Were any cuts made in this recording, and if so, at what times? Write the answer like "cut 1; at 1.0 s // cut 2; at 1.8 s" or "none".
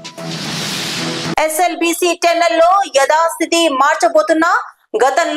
cut 1; at 1.3 s

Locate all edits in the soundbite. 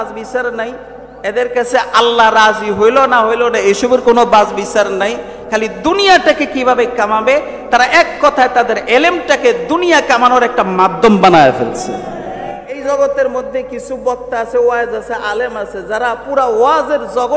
cut 1; at 12.8 s

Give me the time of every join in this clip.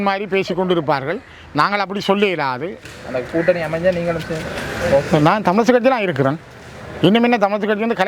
cut 1; at 2.7 s

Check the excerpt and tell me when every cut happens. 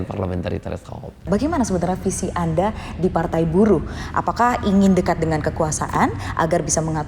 cut 1; at 1.3 s

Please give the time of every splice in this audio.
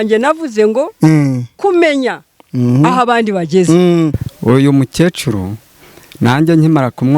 cut 1; at 4.3 s

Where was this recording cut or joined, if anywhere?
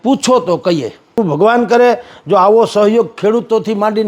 cut 1; at 1.1 s

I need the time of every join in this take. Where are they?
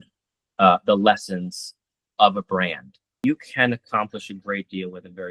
cut 1; at 3.1 s

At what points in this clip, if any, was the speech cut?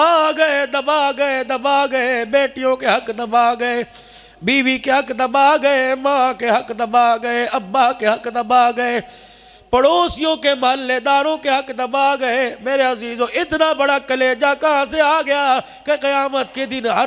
none

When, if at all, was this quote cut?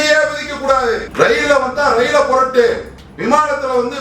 cut 1; at 1.1 s

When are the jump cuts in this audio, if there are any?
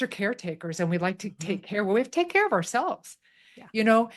none

